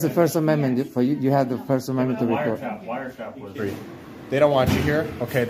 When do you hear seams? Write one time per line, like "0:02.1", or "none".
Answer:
0:03.6

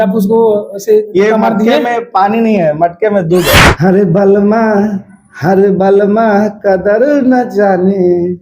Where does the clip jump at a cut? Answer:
0:03.7

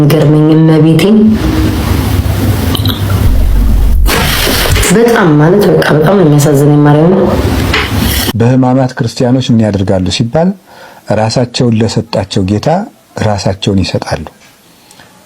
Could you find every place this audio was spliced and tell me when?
0:08.2

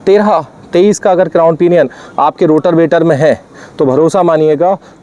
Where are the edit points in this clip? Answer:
none

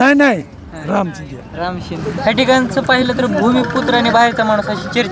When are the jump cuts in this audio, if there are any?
0:02.0

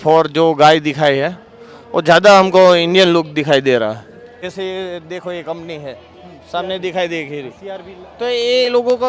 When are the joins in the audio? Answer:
0:04.2

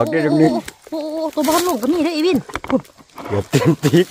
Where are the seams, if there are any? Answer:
none

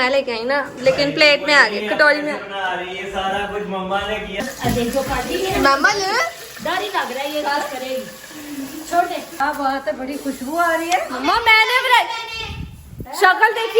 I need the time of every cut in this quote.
0:04.3
0:09.4

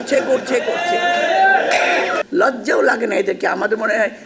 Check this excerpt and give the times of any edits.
0:02.2

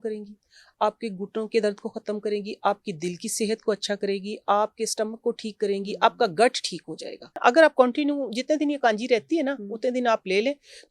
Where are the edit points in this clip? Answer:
0:07.3

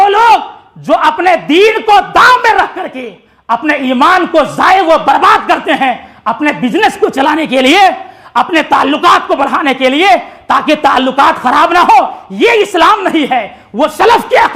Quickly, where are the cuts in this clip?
none

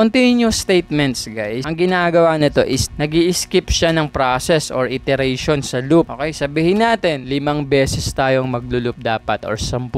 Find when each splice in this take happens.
0:01.6

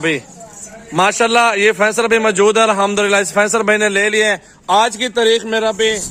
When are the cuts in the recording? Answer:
none

